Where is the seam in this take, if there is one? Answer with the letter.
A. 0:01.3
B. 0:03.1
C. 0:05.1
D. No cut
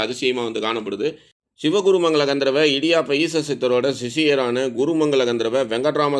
A